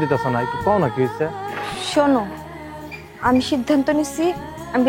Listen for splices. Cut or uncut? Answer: cut